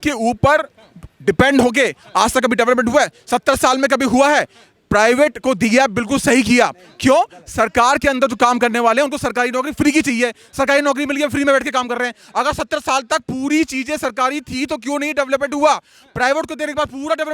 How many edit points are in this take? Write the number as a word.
zero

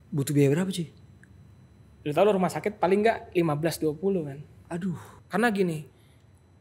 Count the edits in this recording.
one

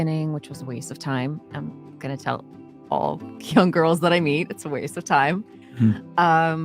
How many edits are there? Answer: zero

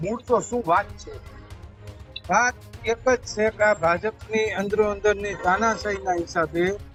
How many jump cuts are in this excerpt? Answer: zero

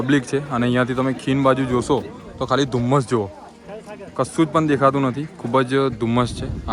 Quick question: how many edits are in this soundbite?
zero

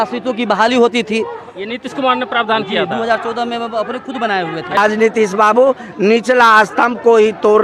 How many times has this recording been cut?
one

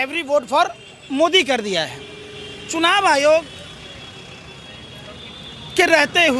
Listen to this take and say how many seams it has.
zero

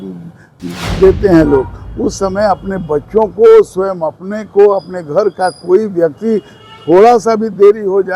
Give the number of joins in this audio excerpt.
zero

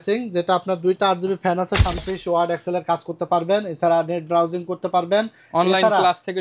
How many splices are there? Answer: one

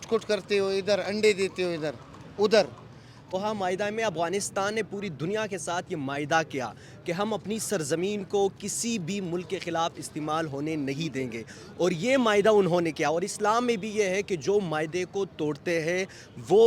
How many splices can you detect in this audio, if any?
one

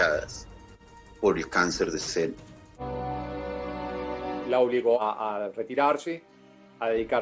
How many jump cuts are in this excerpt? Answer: two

